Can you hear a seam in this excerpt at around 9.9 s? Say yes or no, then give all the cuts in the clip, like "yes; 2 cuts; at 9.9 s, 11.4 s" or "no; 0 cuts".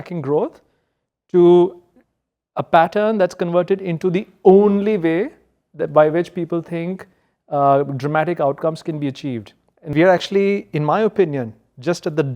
yes; 1 cut; at 9.9 s